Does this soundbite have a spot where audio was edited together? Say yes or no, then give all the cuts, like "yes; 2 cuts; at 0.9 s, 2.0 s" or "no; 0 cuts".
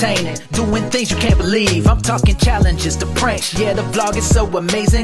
no; 0 cuts